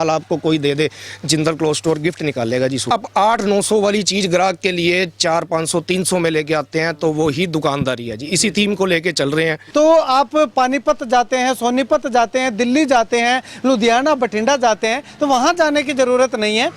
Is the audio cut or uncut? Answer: cut